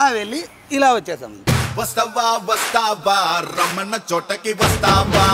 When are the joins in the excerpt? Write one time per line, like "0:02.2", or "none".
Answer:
0:01.3